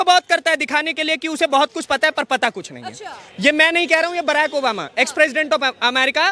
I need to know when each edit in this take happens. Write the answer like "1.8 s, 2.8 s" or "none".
none

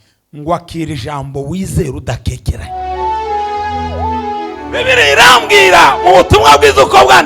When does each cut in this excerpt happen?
2.7 s

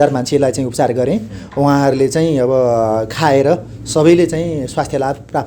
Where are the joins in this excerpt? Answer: none

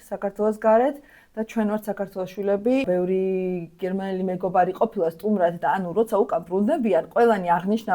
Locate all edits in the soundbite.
2.8 s

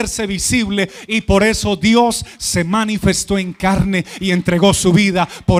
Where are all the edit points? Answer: none

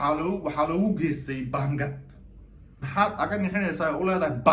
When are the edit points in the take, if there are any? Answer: 2.8 s

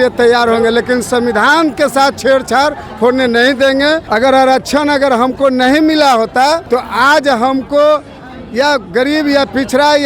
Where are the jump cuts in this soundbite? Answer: 4.0 s, 6.6 s

